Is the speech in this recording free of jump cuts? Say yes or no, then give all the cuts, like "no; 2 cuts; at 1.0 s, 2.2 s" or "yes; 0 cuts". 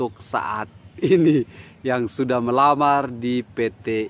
yes; 0 cuts